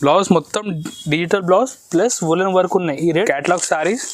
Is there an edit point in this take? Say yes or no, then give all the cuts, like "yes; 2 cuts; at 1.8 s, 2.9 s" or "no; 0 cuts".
yes; 1 cut; at 3.1 s